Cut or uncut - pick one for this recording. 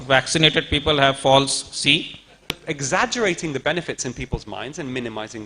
cut